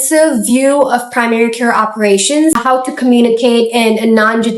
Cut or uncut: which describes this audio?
cut